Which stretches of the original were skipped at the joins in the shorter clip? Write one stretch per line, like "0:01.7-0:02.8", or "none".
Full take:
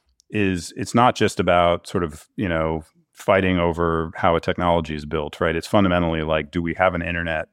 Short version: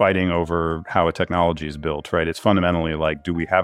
none